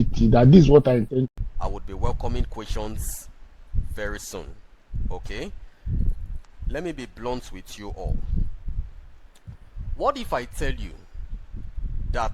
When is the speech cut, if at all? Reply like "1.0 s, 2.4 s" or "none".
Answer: 1.4 s